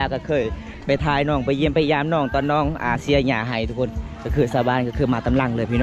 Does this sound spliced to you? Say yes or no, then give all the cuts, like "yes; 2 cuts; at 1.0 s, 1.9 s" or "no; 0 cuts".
no; 0 cuts